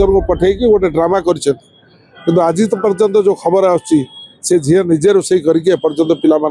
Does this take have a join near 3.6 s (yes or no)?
no